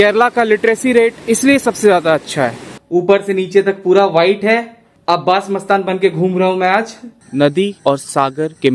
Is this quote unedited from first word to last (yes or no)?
no